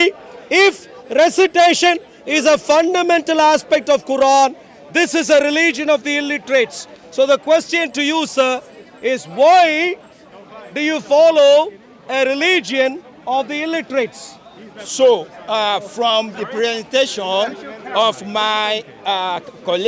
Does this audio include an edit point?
no; 0 cuts

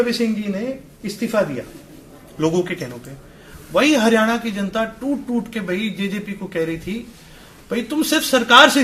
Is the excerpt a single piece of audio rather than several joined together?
yes; 0 cuts

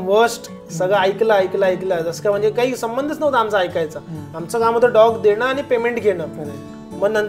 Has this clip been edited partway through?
no; 0 cuts

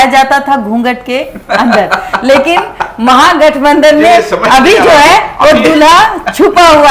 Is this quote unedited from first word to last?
yes; 0 cuts

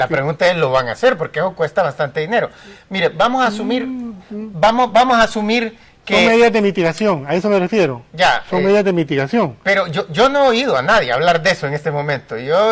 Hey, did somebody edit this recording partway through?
no; 0 cuts

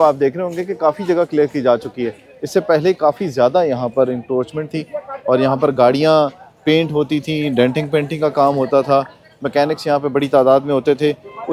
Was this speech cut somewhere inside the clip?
no; 0 cuts

